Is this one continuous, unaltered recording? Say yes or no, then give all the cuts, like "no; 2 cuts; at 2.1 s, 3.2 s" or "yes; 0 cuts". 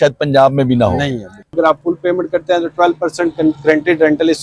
no; 1 cut; at 1.5 s